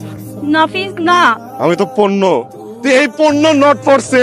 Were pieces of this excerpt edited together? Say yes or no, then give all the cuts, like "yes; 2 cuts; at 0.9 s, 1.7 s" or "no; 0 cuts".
no; 0 cuts